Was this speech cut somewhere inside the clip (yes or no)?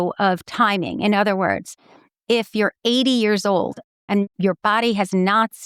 no